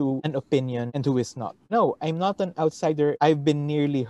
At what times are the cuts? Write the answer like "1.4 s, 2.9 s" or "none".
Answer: 1.6 s, 3.2 s